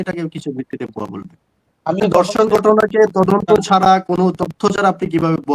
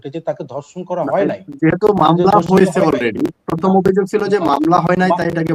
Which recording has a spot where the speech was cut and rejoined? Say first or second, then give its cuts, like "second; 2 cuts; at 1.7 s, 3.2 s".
first; 1 cut; at 2.0 s